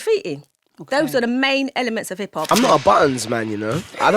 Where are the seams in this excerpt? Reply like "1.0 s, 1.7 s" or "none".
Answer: 2.5 s